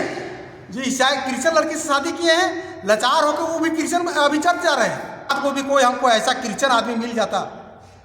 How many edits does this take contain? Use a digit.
1